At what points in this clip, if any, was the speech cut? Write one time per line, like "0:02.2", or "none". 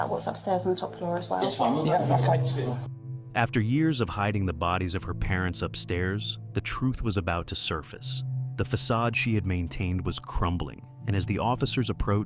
0:02.8